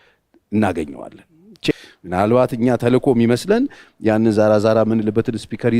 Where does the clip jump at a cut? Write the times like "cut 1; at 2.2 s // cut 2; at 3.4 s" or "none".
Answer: cut 1; at 1.7 s